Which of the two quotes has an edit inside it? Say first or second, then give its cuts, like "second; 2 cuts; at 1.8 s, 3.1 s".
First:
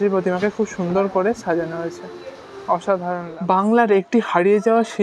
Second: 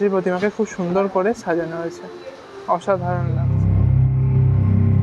first; 1 cut; at 3.4 s